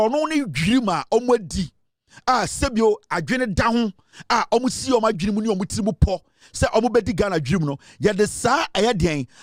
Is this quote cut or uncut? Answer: uncut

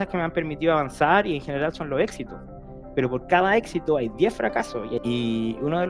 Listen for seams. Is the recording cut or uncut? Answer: cut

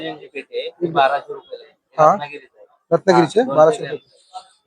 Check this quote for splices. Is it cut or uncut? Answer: uncut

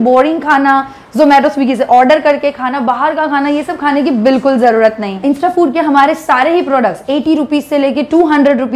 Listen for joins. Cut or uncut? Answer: uncut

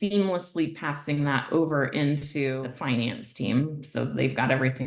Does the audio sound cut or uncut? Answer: cut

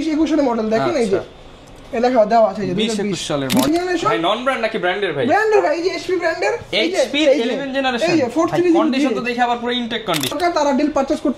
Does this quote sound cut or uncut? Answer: cut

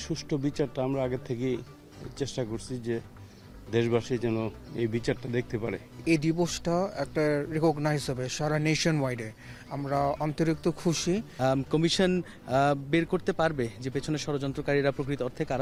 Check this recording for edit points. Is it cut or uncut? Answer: uncut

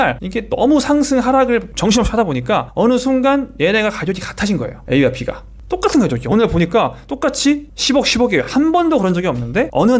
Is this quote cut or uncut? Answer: uncut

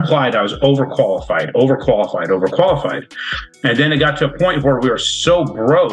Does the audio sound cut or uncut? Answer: uncut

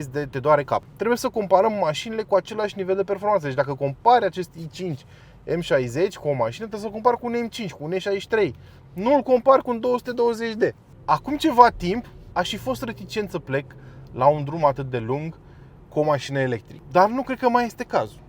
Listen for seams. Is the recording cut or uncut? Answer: cut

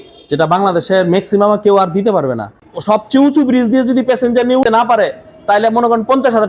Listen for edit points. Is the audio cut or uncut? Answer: cut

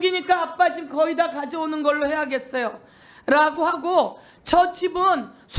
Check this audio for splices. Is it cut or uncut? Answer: uncut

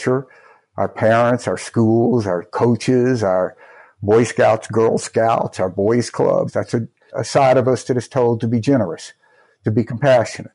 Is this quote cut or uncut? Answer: cut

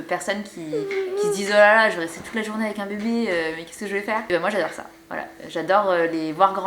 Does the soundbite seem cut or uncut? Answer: uncut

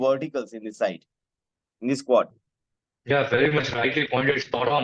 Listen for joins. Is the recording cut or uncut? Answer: uncut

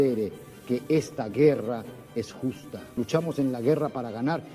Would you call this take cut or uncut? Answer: cut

